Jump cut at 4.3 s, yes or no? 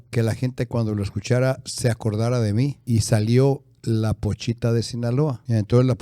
no